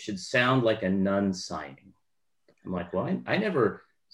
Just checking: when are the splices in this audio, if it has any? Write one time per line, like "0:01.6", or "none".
none